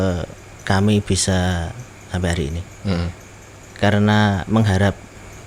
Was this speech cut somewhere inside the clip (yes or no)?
no